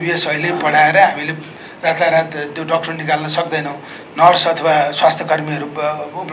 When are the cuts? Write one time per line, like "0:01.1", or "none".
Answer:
none